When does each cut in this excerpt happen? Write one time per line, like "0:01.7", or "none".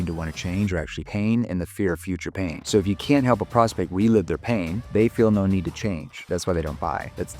0:04.8
0:06.2